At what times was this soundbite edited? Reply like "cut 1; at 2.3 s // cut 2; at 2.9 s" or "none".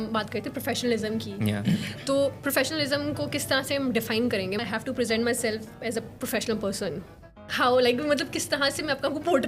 cut 1; at 4.6 s

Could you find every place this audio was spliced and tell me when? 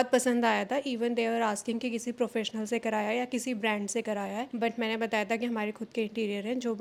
none

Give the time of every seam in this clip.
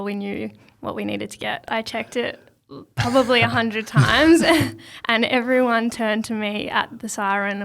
cut 1; at 1.6 s

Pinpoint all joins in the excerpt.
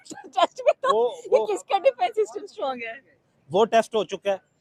none

